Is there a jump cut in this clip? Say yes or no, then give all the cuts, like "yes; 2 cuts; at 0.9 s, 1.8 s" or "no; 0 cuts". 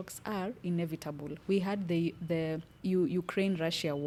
no; 0 cuts